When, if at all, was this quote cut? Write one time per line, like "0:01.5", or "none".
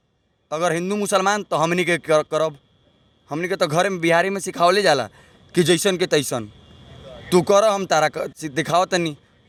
none

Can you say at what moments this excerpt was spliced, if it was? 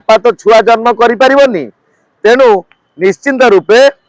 none

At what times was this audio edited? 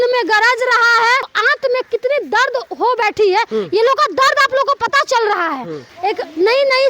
0:01.3
0:05.9

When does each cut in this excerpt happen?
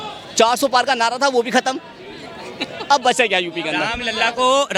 none

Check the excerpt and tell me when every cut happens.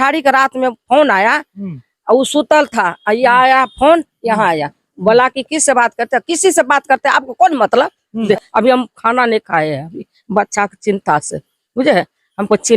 0:08.2

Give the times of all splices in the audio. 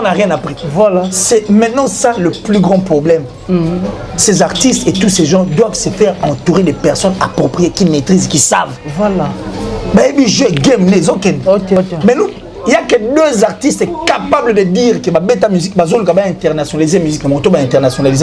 0:11.8

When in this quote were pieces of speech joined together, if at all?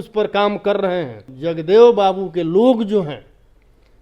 0:01.3

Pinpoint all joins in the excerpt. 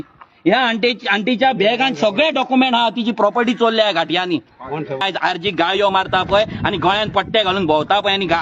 0:05.0

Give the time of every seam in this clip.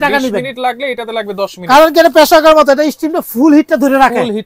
none

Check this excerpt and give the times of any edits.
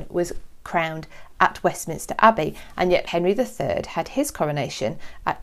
0:03.0

